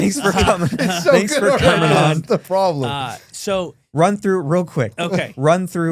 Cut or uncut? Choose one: uncut